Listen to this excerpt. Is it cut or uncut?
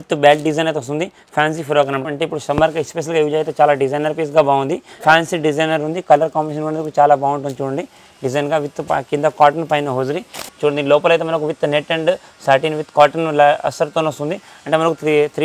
cut